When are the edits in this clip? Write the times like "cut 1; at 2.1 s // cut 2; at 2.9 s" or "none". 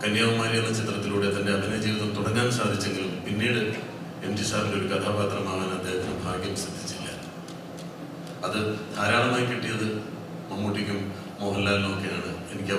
none